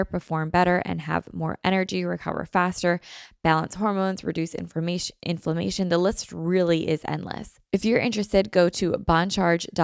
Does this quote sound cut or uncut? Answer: cut